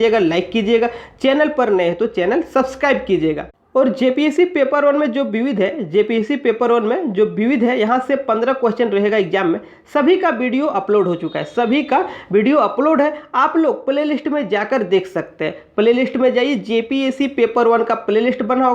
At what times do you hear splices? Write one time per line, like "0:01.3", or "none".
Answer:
0:03.5